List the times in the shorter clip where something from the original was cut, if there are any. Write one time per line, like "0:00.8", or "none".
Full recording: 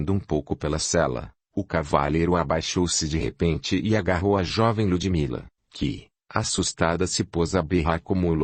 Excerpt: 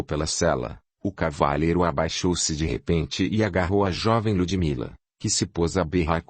0:05.3